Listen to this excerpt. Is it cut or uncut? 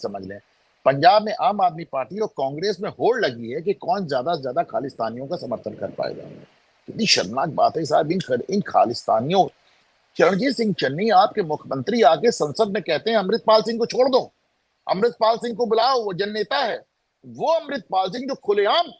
uncut